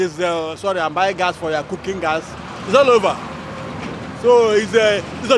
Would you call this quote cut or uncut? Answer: uncut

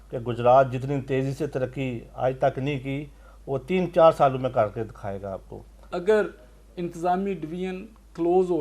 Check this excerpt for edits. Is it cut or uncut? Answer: cut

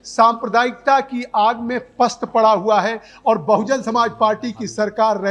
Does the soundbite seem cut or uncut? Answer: uncut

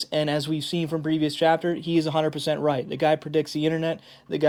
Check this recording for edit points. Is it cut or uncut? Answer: uncut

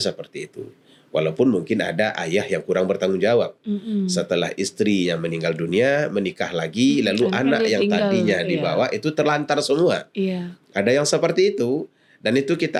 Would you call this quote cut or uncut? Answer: uncut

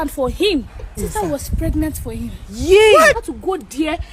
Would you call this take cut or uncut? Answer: cut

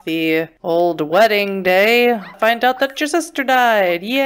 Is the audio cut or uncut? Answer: cut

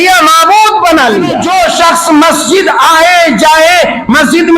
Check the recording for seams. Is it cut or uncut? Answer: cut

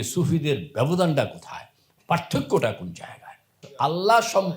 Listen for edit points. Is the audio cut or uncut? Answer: cut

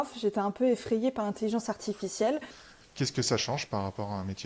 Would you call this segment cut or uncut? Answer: cut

